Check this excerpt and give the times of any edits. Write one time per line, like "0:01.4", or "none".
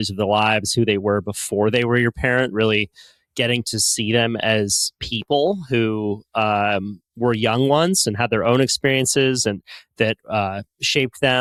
none